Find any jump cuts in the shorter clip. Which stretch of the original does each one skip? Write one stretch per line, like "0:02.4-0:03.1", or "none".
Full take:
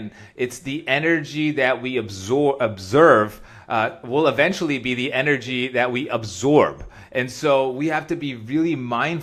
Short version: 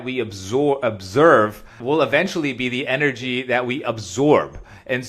0:03.5-0:04.0